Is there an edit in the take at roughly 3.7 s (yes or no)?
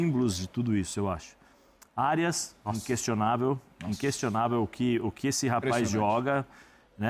no